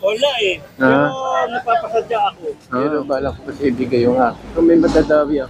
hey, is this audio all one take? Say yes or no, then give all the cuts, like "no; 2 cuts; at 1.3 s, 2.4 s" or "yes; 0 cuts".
no; 1 cut; at 2.9 s